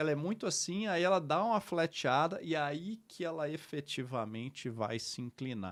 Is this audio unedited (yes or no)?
yes